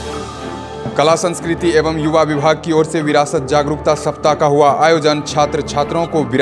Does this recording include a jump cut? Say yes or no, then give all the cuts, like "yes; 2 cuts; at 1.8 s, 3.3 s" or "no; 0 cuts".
yes; 1 cut; at 0.9 s